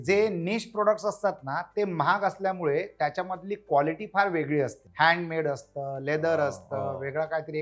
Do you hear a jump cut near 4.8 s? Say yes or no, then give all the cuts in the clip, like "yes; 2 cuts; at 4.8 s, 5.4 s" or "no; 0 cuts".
yes; 1 cut; at 4.8 s